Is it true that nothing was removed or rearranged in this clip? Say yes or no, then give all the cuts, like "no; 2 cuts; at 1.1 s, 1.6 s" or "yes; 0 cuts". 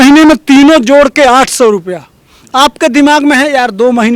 yes; 0 cuts